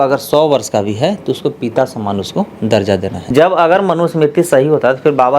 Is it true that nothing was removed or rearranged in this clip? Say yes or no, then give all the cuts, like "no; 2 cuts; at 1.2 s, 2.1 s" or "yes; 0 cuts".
no; 1 cut; at 3.3 s